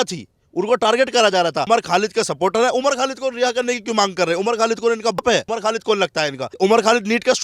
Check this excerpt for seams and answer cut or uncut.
cut